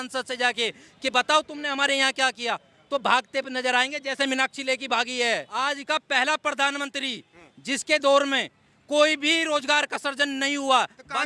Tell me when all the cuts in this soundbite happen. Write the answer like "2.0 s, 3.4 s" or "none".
5.6 s